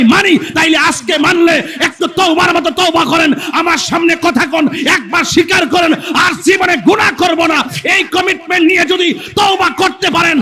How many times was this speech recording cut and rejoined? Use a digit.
0